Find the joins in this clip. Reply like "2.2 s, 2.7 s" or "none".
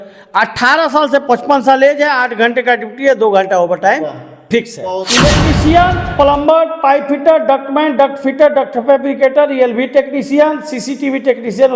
5.0 s

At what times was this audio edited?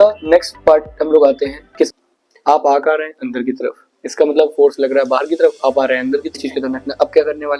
1.9 s, 6.4 s

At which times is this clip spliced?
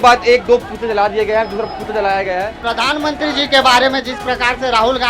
2.7 s

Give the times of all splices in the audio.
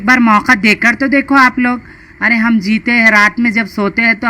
2.1 s

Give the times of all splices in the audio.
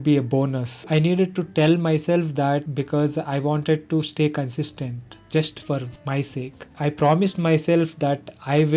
0.9 s, 2.7 s, 6.7 s

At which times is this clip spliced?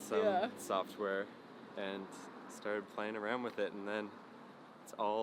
none

